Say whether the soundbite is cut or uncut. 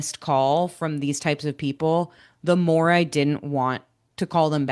uncut